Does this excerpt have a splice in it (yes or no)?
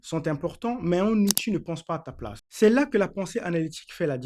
yes